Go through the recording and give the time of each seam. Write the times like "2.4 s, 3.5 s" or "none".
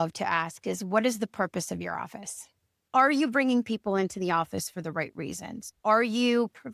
2.9 s